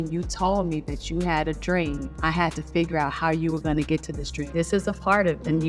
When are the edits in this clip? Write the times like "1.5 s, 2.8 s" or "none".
none